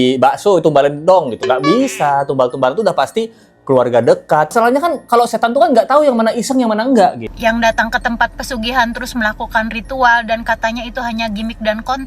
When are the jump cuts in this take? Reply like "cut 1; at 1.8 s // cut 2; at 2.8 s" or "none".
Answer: cut 1; at 4.5 s // cut 2; at 7.3 s